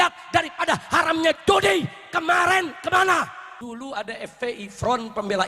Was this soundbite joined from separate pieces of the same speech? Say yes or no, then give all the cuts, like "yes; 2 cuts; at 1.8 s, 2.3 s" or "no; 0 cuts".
yes; 1 cut; at 3.4 s